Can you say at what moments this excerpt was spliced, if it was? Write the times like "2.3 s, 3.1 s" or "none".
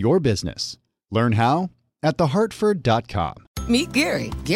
3.4 s